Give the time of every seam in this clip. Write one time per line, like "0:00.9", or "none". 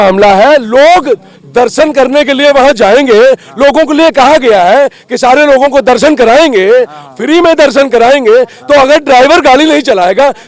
none